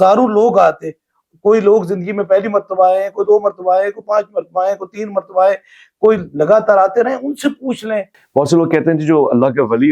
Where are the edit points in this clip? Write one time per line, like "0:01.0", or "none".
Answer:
0:08.1